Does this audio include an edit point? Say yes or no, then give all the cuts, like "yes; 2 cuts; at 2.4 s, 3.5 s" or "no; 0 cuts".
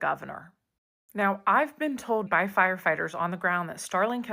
yes; 1 cut; at 2.3 s